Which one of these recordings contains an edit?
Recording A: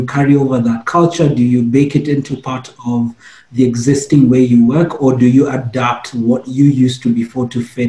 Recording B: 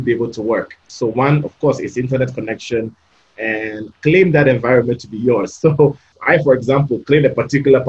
B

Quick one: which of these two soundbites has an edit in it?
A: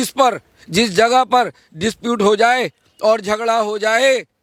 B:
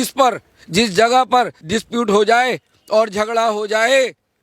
B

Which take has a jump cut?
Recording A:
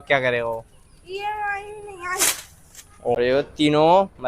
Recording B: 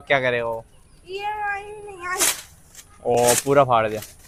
A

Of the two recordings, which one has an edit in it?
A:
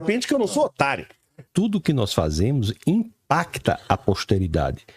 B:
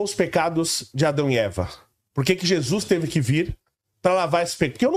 A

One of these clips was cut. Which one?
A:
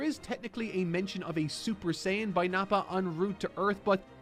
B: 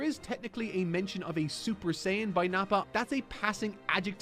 B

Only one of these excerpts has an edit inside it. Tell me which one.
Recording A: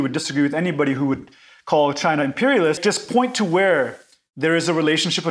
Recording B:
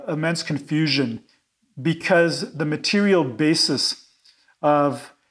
A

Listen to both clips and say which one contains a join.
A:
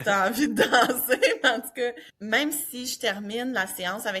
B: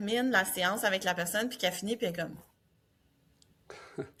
A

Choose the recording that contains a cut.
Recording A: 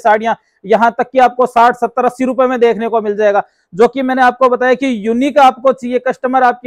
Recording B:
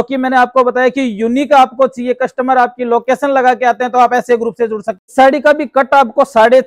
B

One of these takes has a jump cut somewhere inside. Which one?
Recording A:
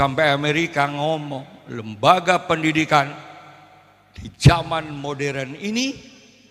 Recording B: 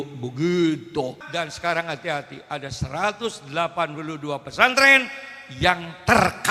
B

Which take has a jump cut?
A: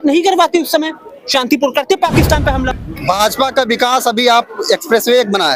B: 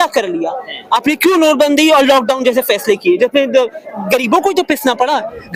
A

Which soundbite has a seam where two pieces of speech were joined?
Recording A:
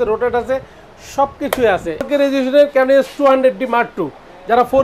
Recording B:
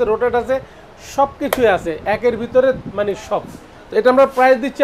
A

